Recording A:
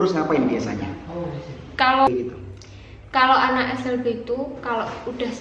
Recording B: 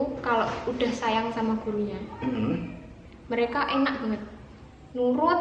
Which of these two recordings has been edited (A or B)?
A